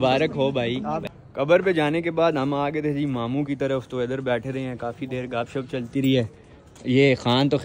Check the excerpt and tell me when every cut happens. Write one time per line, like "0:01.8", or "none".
0:01.1